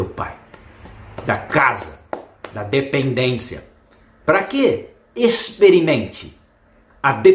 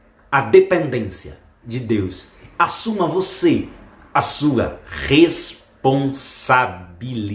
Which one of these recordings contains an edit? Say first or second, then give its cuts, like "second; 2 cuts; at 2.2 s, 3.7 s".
first; 1 cut; at 5.2 s